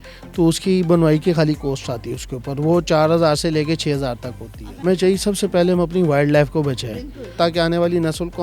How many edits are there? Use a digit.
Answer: 2